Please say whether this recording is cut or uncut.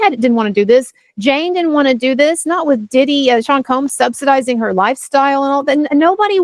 uncut